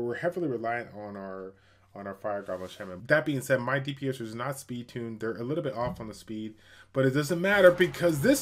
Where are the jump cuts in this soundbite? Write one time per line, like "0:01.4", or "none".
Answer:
0:03.0